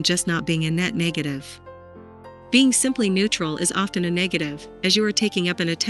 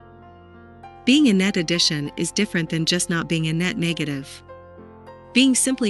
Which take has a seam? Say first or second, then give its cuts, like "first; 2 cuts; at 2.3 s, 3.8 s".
second; 1 cut; at 1.1 s